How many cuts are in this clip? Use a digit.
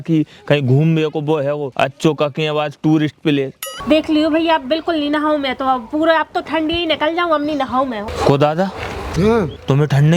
3